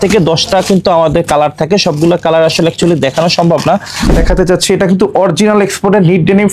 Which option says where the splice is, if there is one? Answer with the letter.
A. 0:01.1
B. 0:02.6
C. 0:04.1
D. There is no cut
C